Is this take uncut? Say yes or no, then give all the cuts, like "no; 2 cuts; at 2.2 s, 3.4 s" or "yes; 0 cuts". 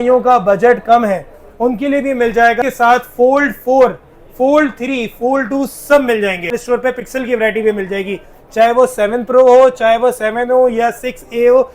no; 2 cuts; at 2.6 s, 6.6 s